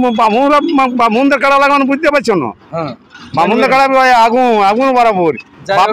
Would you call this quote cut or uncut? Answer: uncut